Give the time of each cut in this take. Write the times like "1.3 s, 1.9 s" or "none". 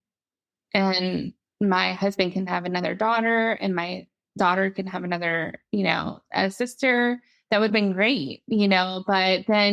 none